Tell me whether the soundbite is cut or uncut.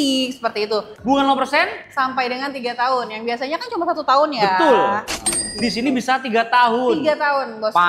cut